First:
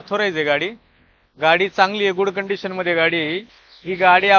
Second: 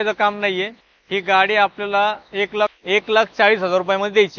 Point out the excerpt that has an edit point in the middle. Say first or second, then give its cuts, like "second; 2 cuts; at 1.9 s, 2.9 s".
second; 1 cut; at 2.7 s